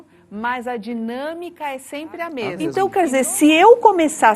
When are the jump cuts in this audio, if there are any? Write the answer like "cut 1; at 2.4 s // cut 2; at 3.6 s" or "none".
cut 1; at 2.7 s